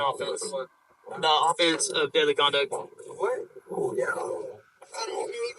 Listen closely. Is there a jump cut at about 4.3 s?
no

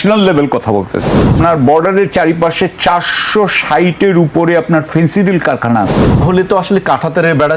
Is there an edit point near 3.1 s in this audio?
no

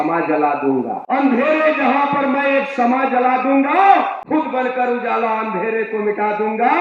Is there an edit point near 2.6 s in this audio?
no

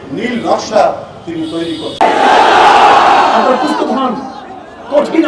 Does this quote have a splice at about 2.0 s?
yes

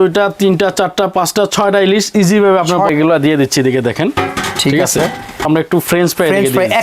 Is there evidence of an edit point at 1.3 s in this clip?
no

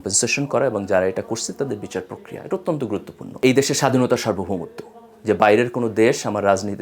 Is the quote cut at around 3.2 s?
yes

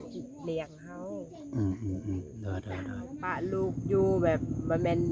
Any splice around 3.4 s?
yes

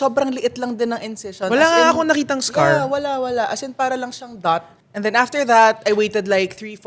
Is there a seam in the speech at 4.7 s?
yes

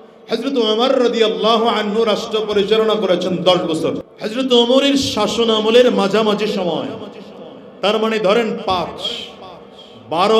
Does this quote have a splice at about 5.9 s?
no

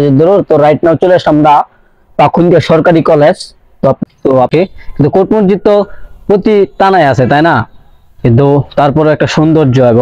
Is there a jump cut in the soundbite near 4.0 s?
yes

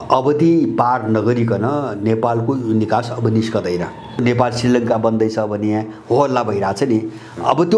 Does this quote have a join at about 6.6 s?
no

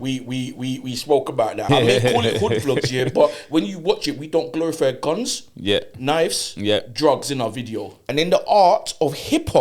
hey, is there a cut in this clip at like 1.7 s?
yes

